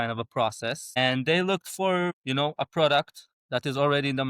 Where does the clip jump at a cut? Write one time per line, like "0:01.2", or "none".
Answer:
0:01.0
0:02.2